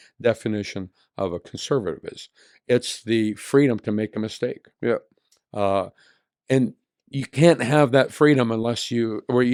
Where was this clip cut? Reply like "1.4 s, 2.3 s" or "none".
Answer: none